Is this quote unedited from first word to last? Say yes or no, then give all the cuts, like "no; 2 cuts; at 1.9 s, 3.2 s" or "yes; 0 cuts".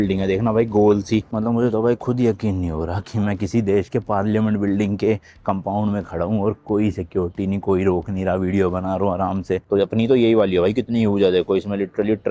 no; 2 cuts; at 1.3 s, 9.6 s